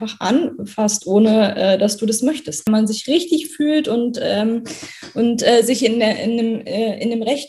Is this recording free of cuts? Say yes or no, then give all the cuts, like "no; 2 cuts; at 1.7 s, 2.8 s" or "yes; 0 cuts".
no; 1 cut; at 2.7 s